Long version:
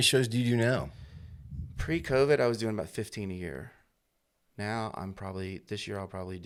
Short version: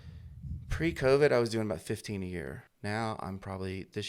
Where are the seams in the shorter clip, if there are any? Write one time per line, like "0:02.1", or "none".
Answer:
0:02.7

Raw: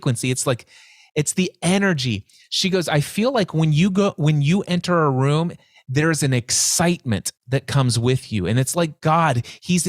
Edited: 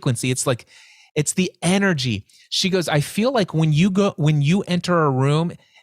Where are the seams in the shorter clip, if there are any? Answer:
none

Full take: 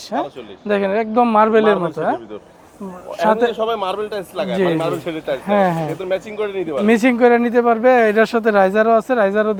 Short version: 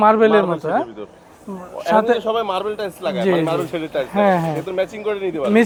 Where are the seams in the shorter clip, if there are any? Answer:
none

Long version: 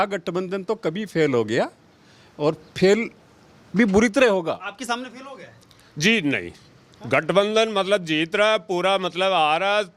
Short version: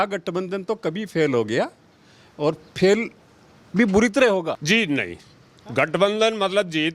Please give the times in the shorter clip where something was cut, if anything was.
0:04.6

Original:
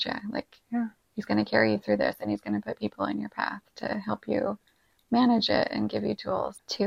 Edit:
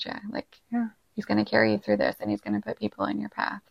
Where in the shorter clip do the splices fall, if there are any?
none

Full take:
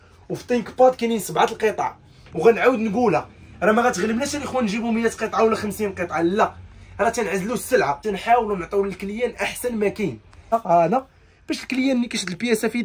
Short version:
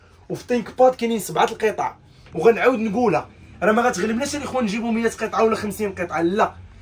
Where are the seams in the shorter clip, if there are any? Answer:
none

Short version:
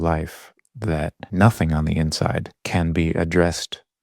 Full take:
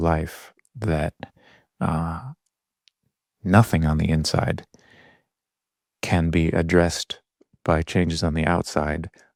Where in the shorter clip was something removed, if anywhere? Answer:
0:01.2
0:02.5

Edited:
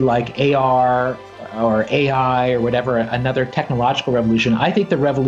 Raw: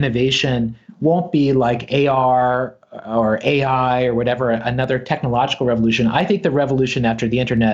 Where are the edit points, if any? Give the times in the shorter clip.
none

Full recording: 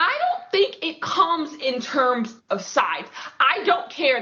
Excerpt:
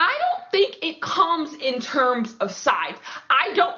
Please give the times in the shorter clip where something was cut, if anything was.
0:02.3

